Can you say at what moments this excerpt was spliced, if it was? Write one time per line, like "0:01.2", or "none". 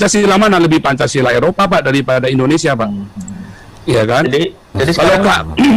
none